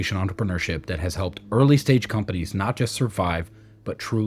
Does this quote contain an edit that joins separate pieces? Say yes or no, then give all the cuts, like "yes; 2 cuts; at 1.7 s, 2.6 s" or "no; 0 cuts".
no; 0 cuts